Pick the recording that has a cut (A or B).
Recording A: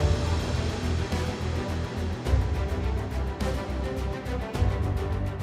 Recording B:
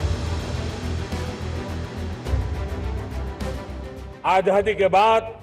B